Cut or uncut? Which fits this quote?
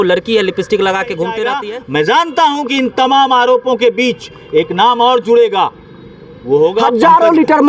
cut